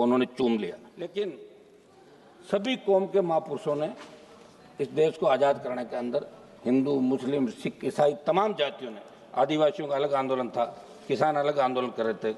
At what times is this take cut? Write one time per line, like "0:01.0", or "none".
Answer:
0:00.9